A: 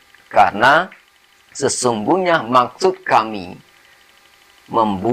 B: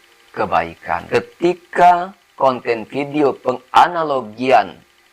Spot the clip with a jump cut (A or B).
B